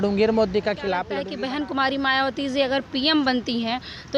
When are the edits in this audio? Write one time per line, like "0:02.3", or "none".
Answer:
0:01.2